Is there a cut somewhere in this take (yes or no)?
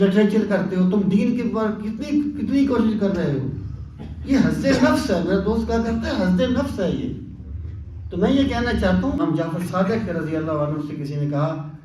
yes